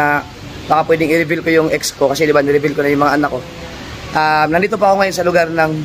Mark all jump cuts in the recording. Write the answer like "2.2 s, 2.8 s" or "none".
none

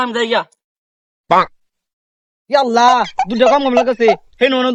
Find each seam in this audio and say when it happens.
none

